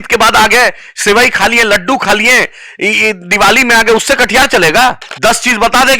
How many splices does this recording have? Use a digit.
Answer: 1